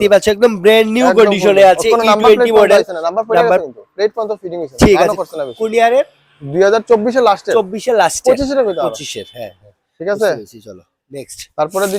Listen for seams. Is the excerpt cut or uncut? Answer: uncut